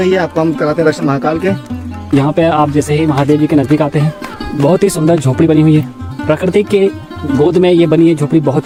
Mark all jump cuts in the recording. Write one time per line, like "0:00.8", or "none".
none